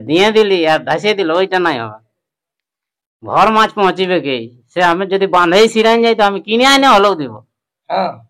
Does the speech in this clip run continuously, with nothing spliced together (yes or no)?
yes